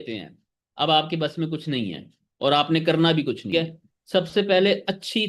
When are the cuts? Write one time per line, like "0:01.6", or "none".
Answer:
0:03.5